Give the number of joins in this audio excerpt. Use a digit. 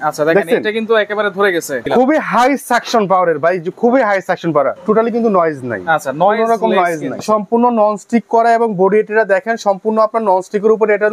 3